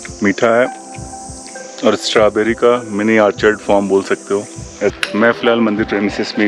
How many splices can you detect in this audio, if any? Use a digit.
1